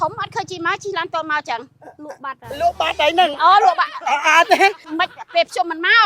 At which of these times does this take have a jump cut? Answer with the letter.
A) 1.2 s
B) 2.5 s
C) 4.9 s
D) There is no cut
C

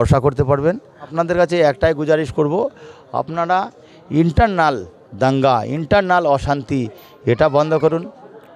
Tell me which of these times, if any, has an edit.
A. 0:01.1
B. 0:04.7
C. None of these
A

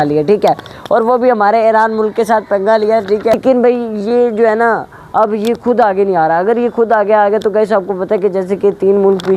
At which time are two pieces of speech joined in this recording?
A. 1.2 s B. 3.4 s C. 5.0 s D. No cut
B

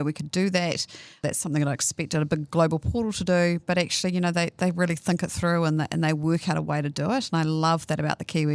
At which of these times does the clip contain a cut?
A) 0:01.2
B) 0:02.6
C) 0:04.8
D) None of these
A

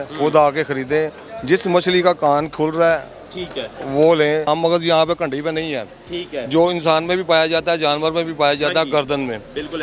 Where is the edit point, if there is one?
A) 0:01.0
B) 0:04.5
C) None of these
B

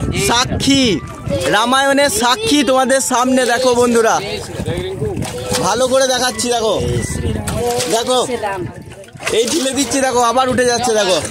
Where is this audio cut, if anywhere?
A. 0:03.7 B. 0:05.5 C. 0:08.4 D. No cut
D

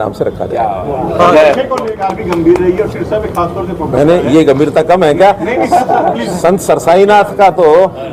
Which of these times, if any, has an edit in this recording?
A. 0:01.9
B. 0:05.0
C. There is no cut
A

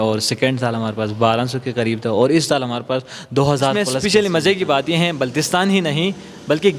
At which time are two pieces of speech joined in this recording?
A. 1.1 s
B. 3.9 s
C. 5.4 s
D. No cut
B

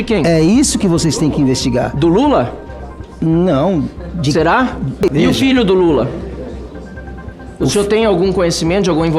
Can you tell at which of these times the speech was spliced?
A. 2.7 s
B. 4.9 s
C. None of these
B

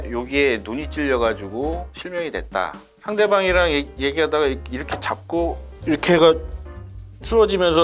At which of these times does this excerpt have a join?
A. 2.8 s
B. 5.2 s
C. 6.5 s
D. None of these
A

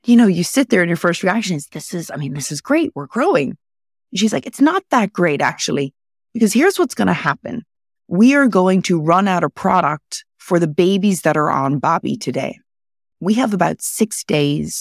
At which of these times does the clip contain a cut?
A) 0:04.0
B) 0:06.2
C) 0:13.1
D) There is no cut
C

